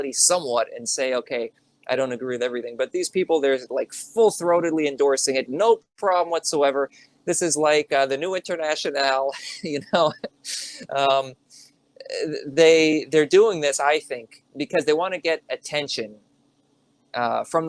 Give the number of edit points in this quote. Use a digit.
0